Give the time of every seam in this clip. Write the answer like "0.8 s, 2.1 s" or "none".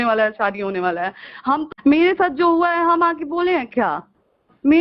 1.7 s